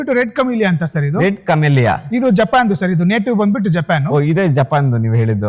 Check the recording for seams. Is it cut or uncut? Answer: uncut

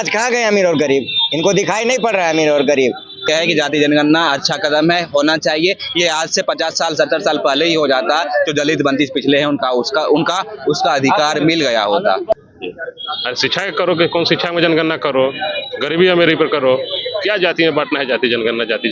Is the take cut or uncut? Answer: cut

